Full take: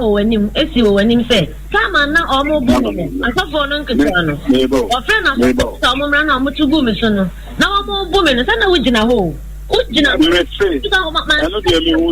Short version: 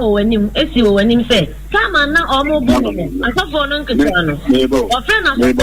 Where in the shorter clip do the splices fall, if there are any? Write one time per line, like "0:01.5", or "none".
none

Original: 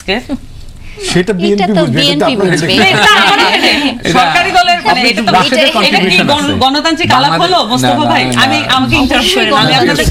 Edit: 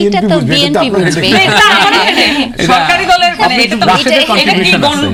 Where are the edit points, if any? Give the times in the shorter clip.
none

